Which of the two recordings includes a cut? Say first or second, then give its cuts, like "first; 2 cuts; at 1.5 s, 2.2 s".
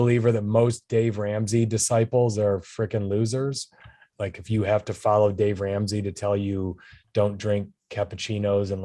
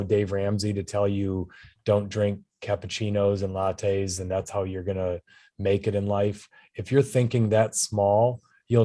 first; 1 cut; at 4.0 s